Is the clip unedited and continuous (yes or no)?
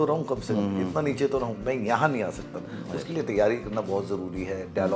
yes